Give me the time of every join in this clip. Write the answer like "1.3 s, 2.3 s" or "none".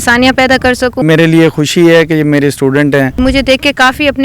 1.0 s, 3.2 s